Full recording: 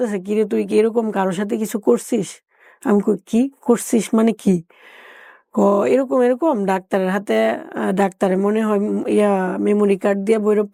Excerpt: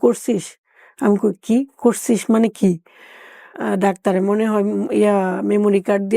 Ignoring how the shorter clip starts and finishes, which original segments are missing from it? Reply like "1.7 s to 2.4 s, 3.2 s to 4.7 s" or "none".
5.4 s to 7.7 s